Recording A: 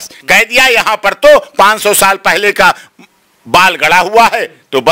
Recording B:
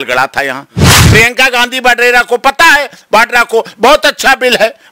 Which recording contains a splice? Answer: B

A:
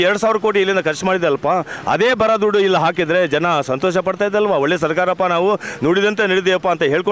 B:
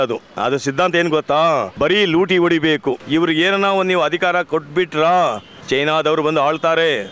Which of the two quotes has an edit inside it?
B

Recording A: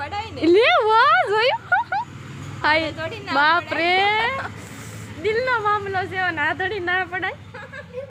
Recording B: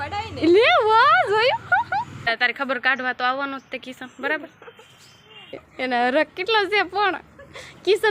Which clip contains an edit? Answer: B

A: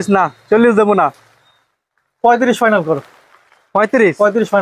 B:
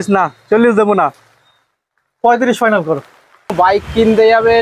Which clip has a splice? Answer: B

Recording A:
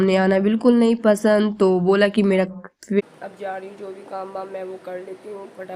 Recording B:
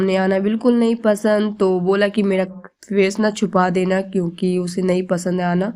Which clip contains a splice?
A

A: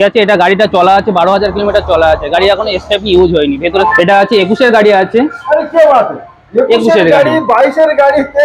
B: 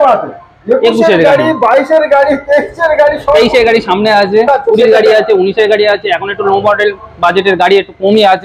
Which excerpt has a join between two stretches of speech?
A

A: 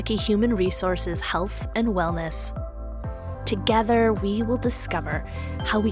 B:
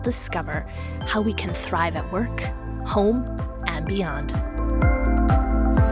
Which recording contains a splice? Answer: A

